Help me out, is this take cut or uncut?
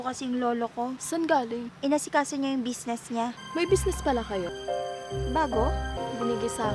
cut